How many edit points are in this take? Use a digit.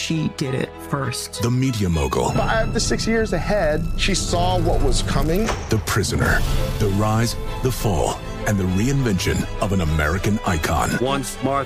0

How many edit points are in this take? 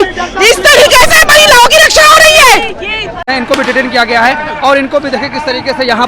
1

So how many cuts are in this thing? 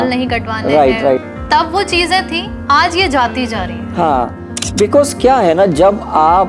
1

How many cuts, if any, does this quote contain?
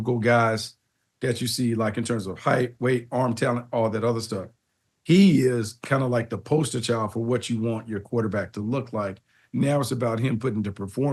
0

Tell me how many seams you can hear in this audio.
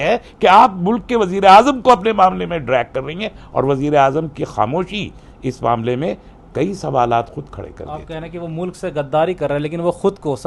0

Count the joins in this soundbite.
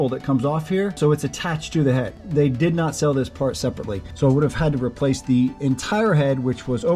3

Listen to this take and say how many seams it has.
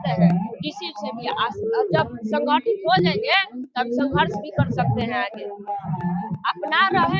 0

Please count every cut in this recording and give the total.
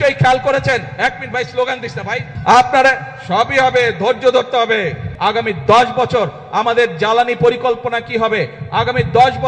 2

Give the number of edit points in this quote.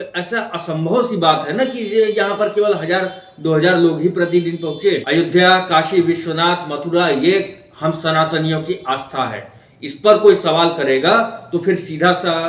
1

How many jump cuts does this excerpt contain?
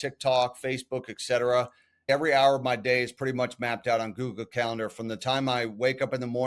1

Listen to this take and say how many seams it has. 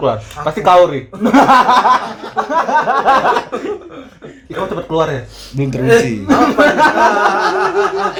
0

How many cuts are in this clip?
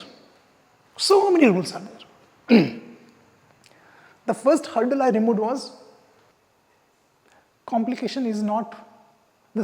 1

